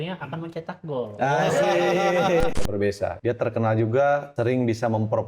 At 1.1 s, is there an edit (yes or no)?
no